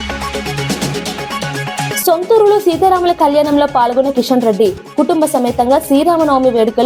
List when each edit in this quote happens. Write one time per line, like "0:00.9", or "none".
none